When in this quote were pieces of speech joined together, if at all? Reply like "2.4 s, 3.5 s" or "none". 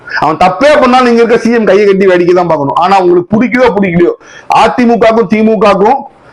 none